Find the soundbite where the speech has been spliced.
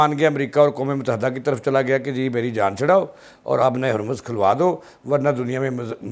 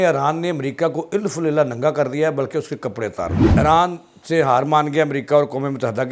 second; 1 cut; at 3.5 s

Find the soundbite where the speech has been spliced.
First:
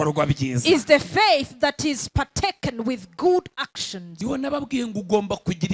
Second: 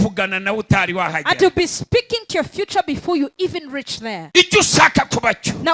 first; 1 cut; at 4.1 s

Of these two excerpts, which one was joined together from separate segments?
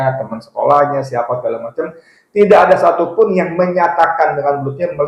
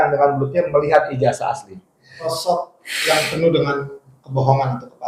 second; 1 cut; at 2.3 s

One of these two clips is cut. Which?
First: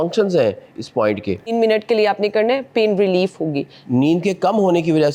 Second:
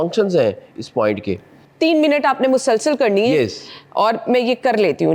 first; 2 cuts; at 1.5 s, 3.7 s

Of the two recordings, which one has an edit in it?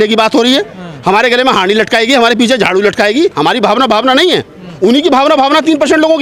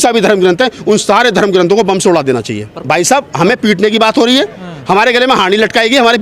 second; 1 cut; at 2.8 s

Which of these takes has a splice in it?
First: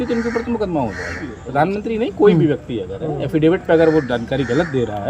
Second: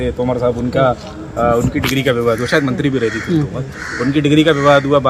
first; 1 cut; at 1.4 s

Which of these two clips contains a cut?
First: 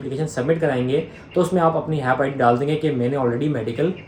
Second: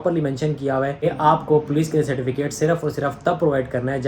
second; 1 cut; at 1.0 s

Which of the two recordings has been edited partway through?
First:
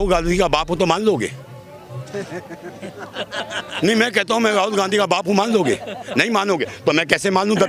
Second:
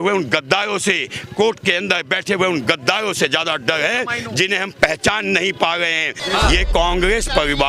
second; 1 cut; at 6.2 s

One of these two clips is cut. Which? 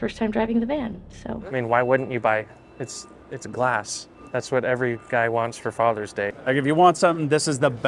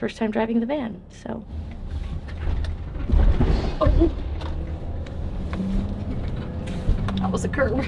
first; 2 cuts; at 1.4 s, 6.3 s

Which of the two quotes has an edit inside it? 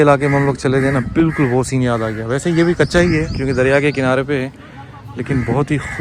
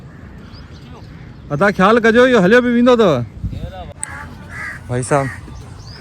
second; 1 cut; at 4.0 s

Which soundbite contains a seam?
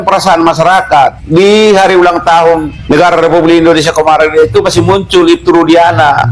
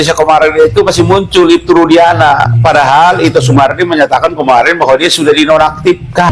first; 2 cuts; at 1.2 s, 2.7 s

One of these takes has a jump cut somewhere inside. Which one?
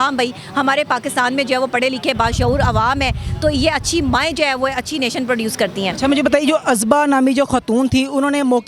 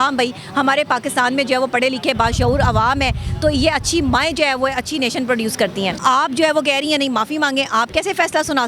second; 1 cut; at 5.9 s

